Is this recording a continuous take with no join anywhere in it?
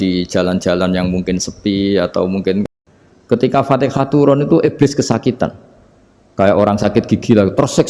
no; 1 cut; at 2.6 s

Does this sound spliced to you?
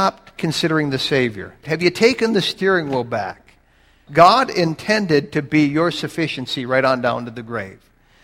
yes; 2 cuts; at 1.6 s, 3.9 s

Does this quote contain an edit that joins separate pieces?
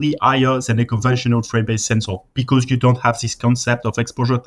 no; 0 cuts

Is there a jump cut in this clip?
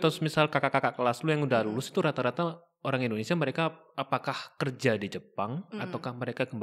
no; 0 cuts

